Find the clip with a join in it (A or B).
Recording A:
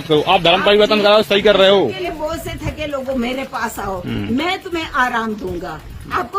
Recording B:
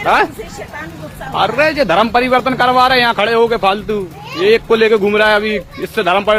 A